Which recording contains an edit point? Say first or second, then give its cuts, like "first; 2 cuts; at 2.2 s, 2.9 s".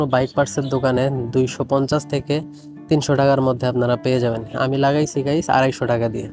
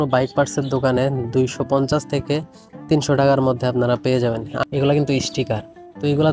second; 1 cut; at 4.5 s